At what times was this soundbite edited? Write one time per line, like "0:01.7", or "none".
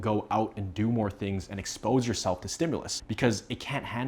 0:03.0